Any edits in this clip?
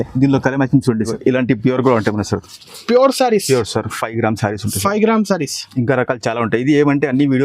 yes; 1 cut; at 1.1 s

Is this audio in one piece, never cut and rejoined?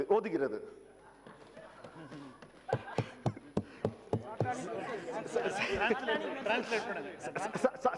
yes; 0 cuts

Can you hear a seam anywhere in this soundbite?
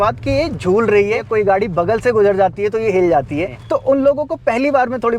yes; 2 cuts; at 1.3 s, 3.5 s

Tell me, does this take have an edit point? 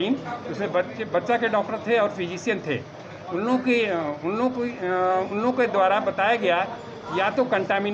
no; 0 cuts

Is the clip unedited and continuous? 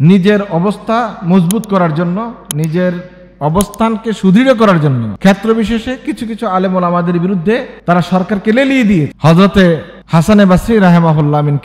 no; 3 cuts; at 5.1 s, 7.7 s, 9.1 s

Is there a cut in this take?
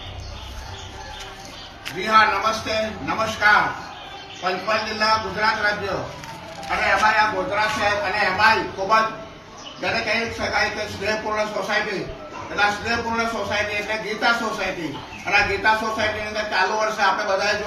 yes; 1 cut; at 10.8 s

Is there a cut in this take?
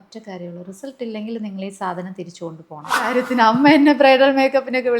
yes; 1 cut; at 3.2 s

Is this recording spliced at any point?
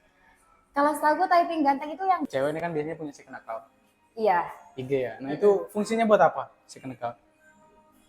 yes; 1 cut; at 2.2 s

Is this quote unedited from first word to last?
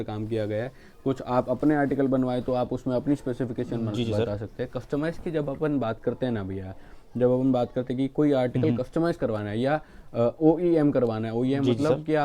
yes; 0 cuts

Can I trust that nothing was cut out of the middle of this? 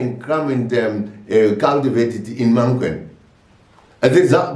yes; 0 cuts

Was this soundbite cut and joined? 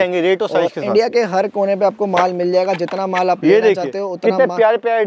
no; 0 cuts

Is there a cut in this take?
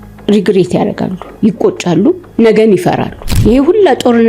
yes; 1 cut; at 3.1 s

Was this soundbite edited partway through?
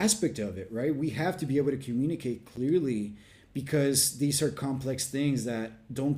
no; 0 cuts

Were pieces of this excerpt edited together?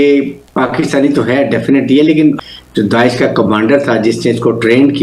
yes; 1 cut; at 2.4 s

